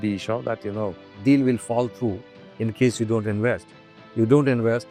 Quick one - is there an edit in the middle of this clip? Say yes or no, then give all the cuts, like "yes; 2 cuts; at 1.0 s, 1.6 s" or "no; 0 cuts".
no; 0 cuts